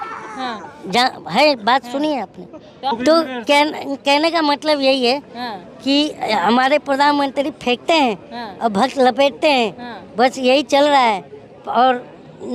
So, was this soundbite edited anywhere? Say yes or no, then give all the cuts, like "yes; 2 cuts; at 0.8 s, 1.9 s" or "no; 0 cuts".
yes; 1 cut; at 2.9 s